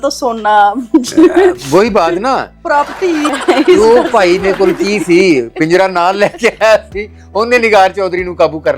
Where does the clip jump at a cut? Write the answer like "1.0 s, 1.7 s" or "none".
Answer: 3.3 s